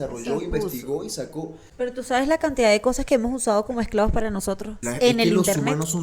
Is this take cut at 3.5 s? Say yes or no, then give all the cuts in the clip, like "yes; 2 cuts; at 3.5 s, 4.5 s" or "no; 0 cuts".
no; 2 cuts; at 1.6 s, 4.8 s